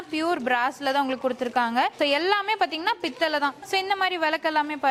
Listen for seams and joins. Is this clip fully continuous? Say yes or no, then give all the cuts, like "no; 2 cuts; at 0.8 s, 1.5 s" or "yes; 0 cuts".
yes; 0 cuts